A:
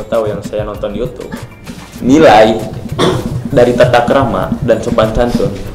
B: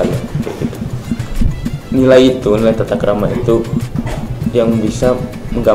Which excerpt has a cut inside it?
A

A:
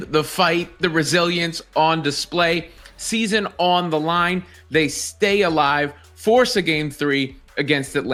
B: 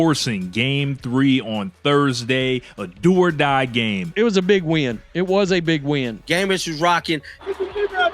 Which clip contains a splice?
B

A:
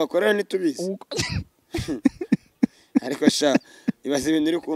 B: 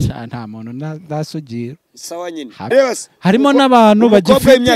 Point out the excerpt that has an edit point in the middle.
B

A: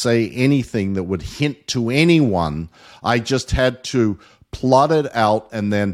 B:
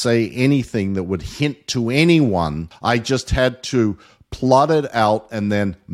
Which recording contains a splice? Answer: B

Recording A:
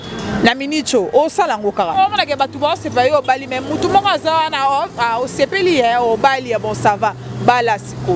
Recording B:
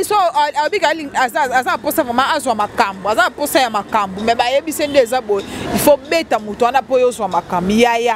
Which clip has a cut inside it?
A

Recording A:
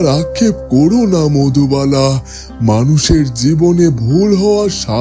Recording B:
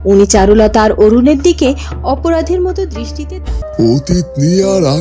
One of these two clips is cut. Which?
B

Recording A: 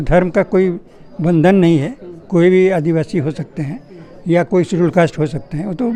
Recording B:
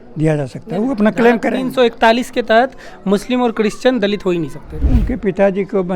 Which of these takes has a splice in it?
B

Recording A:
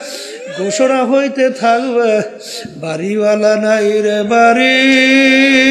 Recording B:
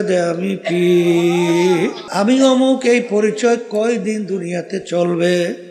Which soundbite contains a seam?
B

